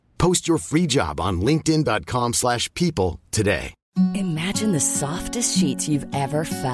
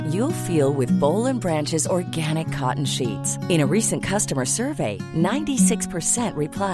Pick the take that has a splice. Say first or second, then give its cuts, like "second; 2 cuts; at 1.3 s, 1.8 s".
first; 1 cut; at 3.8 s